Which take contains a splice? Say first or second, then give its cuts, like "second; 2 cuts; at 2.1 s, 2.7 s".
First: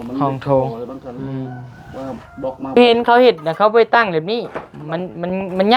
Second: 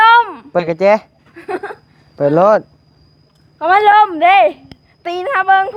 first; 1 cut; at 2.8 s